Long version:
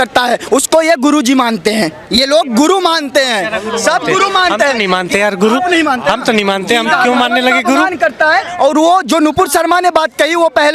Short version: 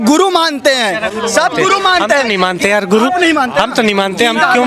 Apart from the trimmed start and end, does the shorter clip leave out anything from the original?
no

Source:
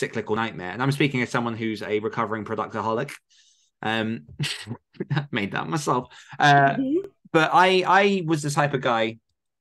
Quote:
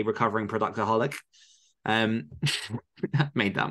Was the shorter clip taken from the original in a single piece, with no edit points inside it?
yes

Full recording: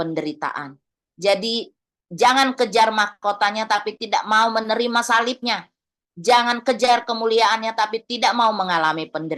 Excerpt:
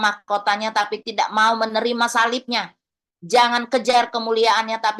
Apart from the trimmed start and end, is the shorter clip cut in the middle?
no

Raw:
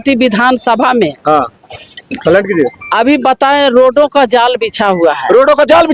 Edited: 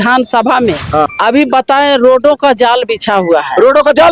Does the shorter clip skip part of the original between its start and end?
yes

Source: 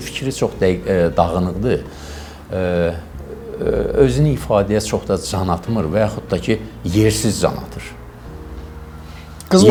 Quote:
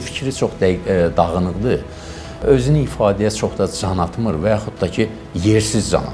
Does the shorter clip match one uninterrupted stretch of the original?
no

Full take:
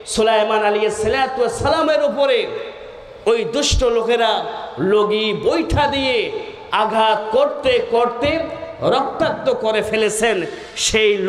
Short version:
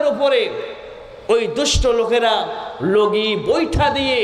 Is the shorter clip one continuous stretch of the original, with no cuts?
yes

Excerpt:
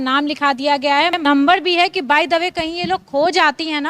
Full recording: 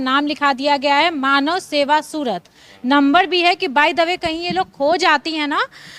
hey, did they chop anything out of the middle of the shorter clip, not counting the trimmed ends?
yes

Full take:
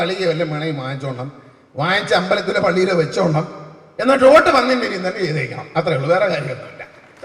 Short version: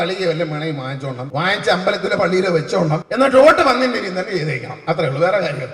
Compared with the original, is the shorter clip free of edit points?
no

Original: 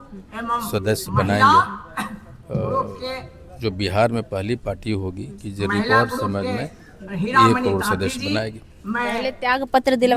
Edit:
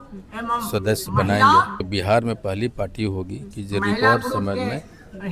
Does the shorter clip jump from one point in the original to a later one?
yes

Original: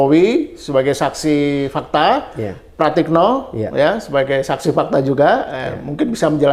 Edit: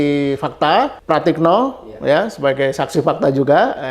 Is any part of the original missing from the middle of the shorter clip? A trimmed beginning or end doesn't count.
yes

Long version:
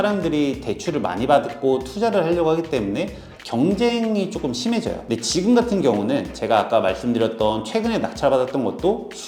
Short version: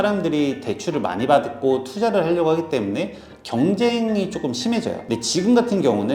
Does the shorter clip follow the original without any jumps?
yes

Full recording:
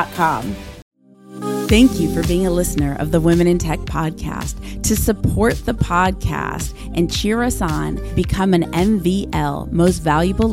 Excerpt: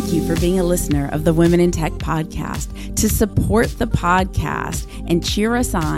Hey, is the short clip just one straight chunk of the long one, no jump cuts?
yes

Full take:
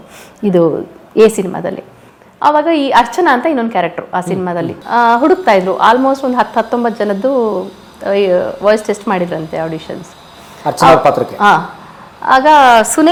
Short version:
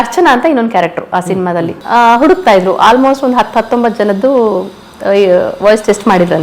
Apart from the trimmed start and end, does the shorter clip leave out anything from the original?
no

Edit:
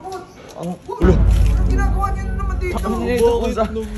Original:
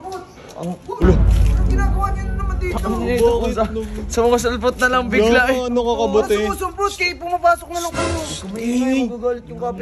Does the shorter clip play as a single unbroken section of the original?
yes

